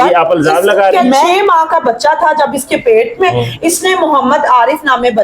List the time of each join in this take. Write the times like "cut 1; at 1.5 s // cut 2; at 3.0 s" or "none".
cut 1; at 1.3 s